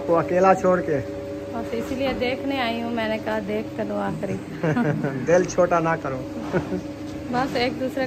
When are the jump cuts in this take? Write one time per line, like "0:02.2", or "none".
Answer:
none

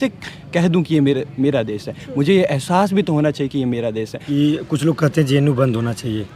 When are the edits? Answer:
0:04.2

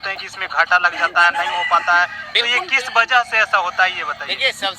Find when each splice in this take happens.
none

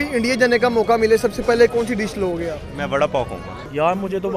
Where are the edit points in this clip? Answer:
0:01.7

